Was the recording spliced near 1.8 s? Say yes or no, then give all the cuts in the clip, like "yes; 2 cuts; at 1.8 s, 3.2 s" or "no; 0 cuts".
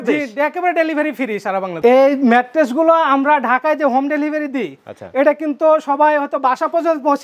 yes; 1 cut; at 1.8 s